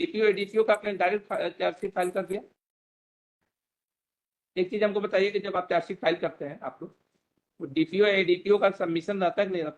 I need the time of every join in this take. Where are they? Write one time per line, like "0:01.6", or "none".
none